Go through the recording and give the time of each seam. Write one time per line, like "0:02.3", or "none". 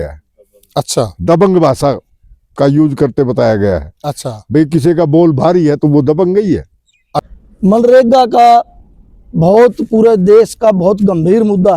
0:07.3